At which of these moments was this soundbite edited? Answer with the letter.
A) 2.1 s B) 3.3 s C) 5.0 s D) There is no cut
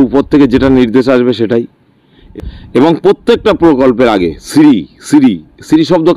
A